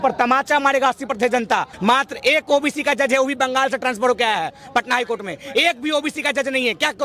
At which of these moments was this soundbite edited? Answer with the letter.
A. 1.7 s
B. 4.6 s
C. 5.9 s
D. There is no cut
A